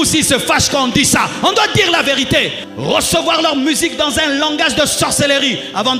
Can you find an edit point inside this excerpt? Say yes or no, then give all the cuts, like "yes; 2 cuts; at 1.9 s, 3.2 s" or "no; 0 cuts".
yes; 1 cut; at 2.6 s